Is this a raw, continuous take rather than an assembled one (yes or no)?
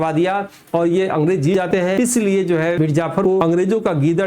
no